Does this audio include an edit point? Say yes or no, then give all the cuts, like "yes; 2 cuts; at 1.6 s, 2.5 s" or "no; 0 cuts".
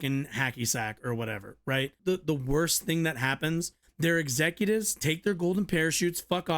yes; 2 cuts; at 2.0 s, 3.8 s